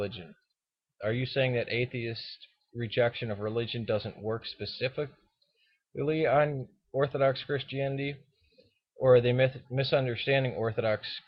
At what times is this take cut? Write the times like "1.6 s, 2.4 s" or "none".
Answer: none